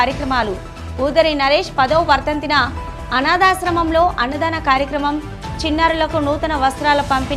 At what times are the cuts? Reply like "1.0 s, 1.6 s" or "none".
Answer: none